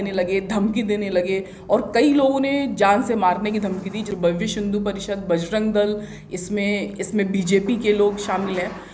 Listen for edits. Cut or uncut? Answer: cut